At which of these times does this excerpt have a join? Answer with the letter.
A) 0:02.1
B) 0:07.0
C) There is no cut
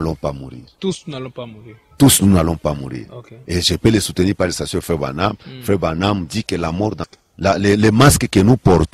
B